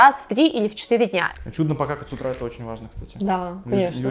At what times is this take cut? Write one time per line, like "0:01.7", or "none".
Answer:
0:01.3